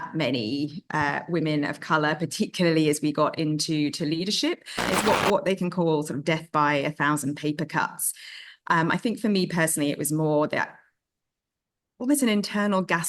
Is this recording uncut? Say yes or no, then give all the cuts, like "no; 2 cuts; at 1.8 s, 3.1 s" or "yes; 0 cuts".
no; 1 cut; at 4.8 s